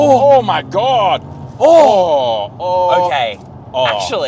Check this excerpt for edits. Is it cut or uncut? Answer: uncut